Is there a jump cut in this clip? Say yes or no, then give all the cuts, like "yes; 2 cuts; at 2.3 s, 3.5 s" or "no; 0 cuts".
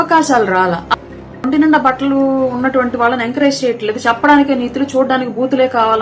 yes; 1 cut; at 1.4 s